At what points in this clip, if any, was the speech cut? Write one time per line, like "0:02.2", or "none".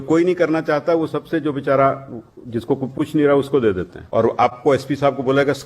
0:03.9